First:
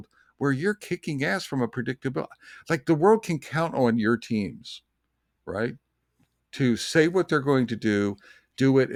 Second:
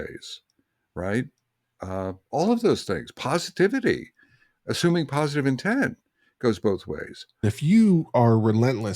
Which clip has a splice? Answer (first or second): second